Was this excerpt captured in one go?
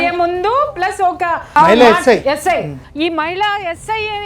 no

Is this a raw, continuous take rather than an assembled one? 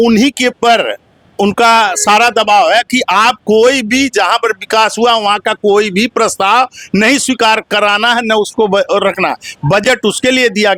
yes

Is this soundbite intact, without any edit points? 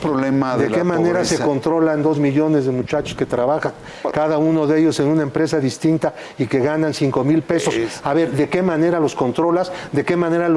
yes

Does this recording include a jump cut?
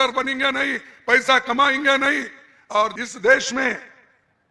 yes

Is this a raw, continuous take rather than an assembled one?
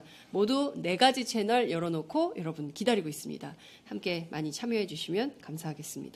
no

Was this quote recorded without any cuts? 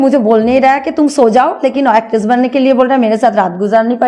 yes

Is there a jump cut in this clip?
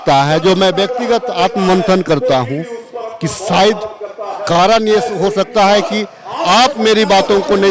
no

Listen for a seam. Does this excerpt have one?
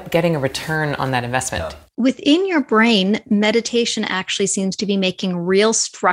yes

